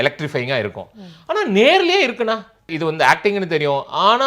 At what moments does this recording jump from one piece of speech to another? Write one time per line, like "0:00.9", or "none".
0:02.7

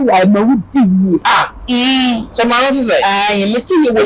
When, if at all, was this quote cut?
0:01.2

